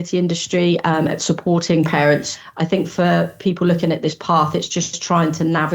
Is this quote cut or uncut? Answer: cut